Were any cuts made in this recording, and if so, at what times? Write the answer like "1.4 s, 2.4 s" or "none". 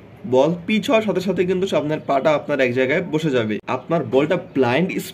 3.6 s